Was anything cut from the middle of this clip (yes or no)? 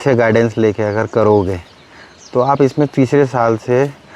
no